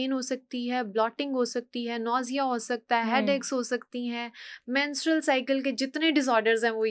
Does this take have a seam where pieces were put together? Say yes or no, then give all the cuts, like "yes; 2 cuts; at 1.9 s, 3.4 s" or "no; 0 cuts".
no; 0 cuts